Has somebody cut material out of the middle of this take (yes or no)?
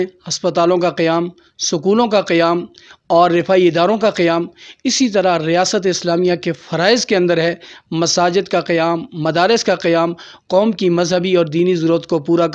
no